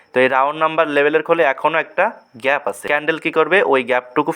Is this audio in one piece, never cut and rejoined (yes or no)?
no